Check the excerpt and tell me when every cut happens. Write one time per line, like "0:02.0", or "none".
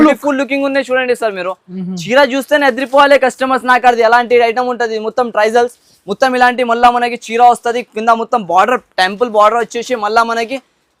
none